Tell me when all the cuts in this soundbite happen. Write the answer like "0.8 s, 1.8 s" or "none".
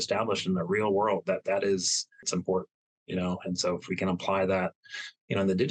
2.2 s